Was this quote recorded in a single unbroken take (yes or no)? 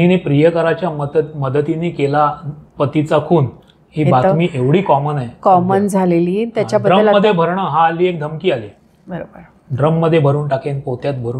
yes